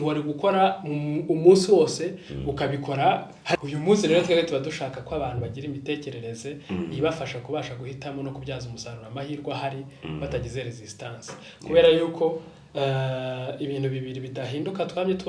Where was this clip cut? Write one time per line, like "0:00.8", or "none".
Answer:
0:03.6